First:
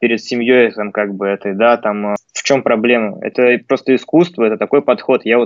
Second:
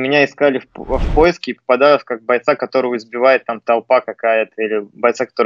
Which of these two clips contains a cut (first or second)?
first